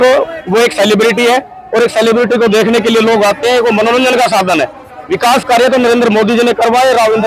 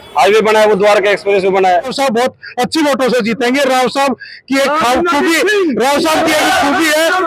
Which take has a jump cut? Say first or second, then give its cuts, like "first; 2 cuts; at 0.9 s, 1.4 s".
second; 1 cut; at 1.9 s